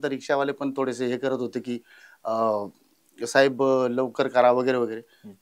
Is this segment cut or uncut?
uncut